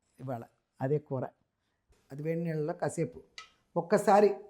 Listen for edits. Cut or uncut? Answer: cut